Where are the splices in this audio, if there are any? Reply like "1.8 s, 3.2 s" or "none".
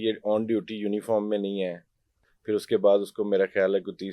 2.1 s